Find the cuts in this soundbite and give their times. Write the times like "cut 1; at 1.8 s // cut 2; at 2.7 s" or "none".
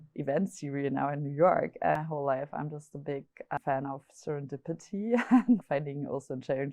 cut 1; at 1.9 s // cut 2; at 3.6 s // cut 3; at 5.6 s

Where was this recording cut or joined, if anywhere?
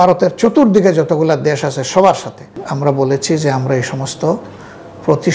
cut 1; at 2.6 s

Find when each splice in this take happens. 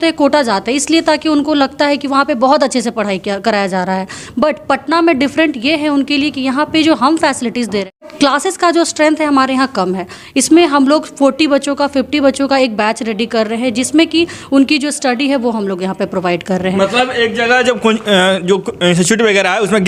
none

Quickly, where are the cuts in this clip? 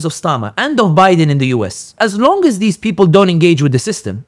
cut 1; at 1.9 s

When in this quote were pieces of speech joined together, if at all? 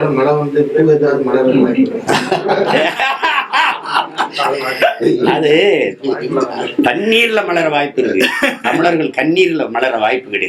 none

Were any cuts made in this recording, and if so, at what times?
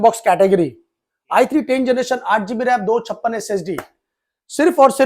none

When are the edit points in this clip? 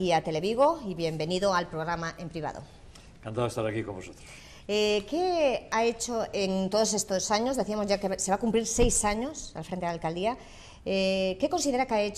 cut 1; at 3.5 s

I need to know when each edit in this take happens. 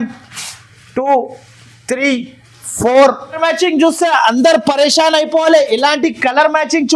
cut 1; at 3.4 s

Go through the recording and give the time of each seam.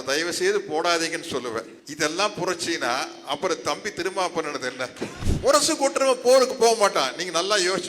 cut 1; at 1.8 s // cut 2; at 5.2 s

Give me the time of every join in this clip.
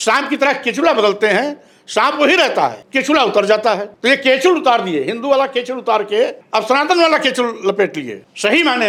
none

